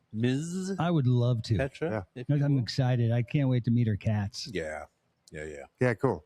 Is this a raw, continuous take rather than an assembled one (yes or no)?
yes